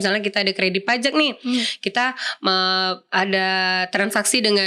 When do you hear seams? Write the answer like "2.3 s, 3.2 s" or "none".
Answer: none